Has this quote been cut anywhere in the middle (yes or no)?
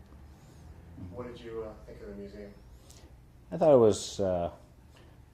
yes